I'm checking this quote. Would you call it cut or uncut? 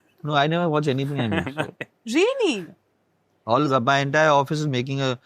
uncut